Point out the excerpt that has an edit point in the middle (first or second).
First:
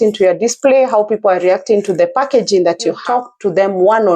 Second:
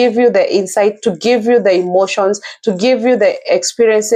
first